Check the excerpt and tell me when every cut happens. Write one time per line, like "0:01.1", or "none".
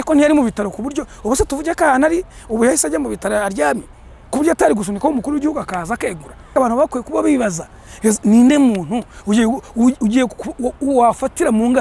0:06.5